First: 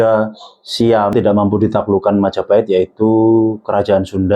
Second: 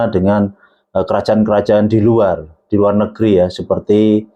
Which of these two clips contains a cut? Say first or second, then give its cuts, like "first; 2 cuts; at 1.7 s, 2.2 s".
first; 1 cut; at 1.1 s